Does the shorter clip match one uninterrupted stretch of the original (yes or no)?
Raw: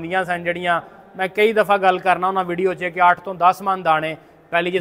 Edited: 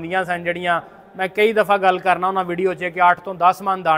yes